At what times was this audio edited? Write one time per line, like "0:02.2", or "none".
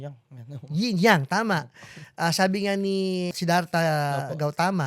0:03.3